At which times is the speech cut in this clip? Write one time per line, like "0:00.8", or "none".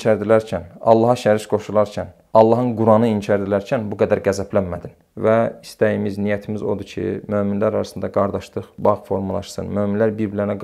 0:05.0